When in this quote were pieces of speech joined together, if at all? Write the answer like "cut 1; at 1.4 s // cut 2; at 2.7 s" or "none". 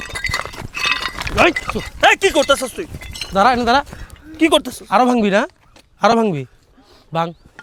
none